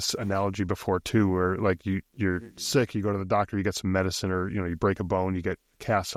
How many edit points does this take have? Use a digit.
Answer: 0